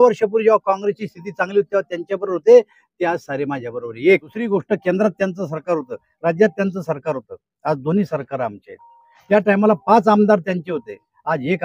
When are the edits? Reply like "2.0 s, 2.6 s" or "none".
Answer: 4.4 s